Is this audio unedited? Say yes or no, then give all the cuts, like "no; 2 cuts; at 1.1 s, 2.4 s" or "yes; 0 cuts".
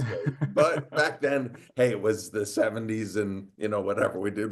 no; 1 cut; at 3.4 s